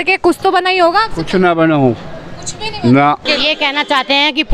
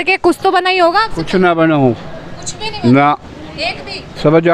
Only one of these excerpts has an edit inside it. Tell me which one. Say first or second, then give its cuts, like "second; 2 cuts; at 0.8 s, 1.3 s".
first; 1 cut; at 3.3 s